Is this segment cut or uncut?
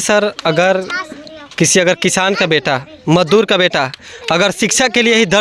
uncut